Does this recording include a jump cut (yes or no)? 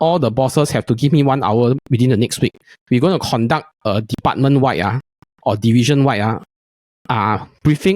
no